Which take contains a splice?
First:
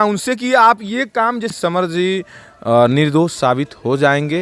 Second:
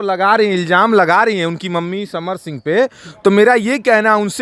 first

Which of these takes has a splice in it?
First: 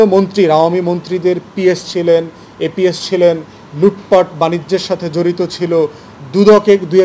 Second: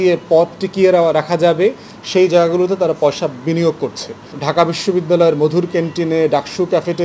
second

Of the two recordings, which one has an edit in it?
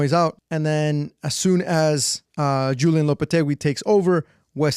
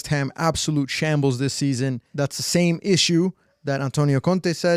second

